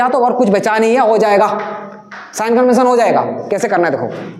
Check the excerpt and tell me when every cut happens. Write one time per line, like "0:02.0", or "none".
none